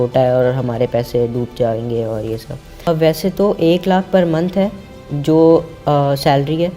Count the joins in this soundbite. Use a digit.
1